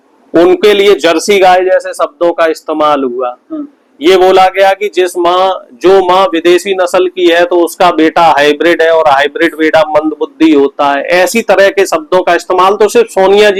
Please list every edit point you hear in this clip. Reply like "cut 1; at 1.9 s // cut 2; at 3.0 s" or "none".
none